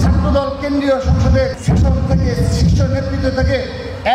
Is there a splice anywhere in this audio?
yes; 1 cut; at 1.6 s

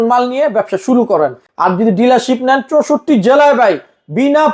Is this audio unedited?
yes; 0 cuts

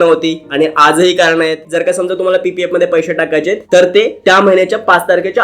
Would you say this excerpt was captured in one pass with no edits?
no; 1 cut; at 1.6 s

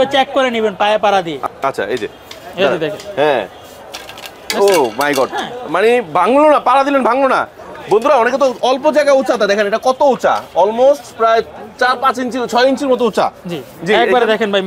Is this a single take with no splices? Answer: yes; 0 cuts

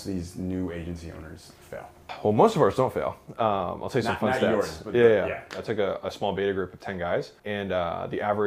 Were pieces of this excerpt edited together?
yes; 3 cuts; at 2.0 s, 5.6 s, 7.4 s

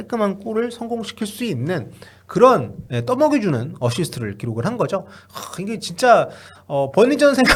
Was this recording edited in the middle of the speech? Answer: no; 0 cuts

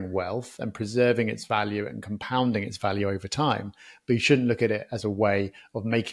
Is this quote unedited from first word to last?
yes; 0 cuts

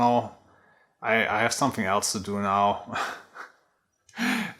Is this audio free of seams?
yes; 0 cuts

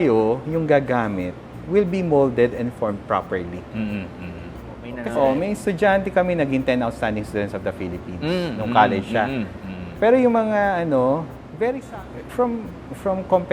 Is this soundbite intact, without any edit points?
no; 2 cuts; at 5.0 s, 11.8 s

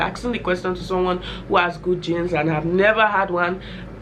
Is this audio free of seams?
yes; 0 cuts

